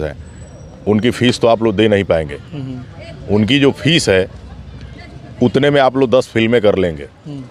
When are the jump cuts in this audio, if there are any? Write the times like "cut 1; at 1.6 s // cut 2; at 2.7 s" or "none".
none